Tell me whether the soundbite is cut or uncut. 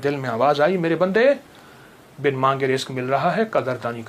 uncut